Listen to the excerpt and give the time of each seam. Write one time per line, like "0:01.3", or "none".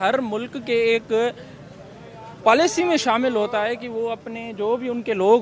none